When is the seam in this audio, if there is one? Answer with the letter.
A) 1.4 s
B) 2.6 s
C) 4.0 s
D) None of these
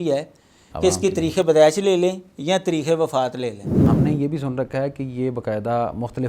C